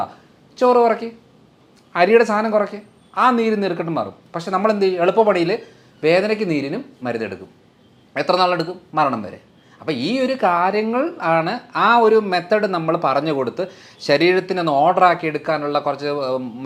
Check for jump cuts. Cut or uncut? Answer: uncut